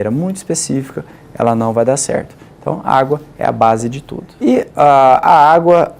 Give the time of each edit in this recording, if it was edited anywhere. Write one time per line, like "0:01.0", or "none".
0:04.2